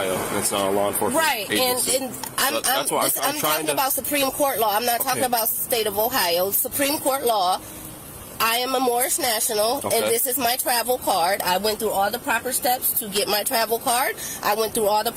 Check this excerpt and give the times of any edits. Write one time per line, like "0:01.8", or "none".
none

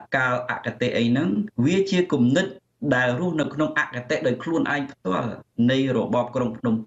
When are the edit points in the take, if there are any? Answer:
0:01.5

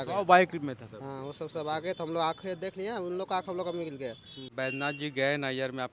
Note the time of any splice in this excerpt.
0:04.5

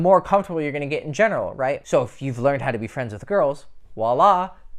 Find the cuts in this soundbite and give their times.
0:01.8

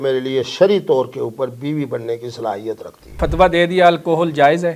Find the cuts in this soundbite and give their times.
0:03.2

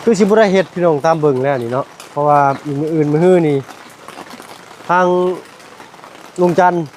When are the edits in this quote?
none

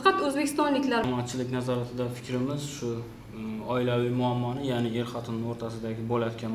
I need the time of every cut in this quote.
0:01.0

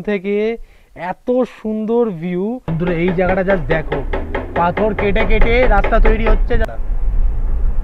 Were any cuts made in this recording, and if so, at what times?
0:02.7

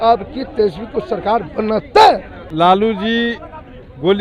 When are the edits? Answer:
0:02.4

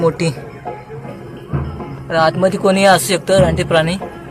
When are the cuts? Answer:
none

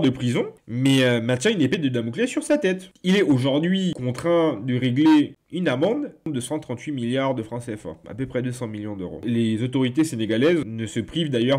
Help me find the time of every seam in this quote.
0:09.2

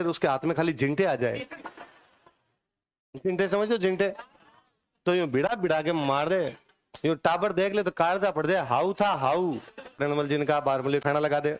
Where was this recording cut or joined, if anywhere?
0:10.0

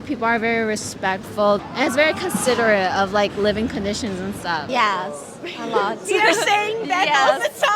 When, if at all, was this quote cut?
0:01.6
0:04.7

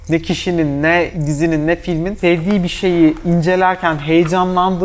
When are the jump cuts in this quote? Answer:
0:01.2
0:02.1

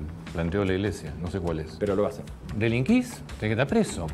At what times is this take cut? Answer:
0:02.3

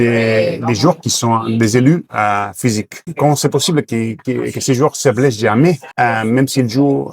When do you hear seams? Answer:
0:03.0
0:05.9

